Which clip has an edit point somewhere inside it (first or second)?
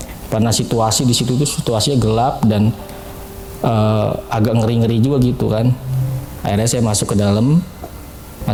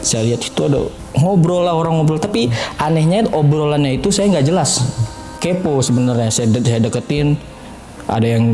second